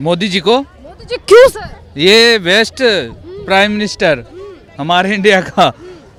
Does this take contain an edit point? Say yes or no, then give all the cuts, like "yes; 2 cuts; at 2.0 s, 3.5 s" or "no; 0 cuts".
no; 0 cuts